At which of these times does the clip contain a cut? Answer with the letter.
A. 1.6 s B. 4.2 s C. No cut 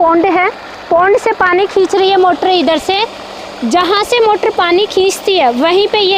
C